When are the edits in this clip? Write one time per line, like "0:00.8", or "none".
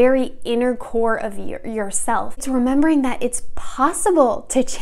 0:02.4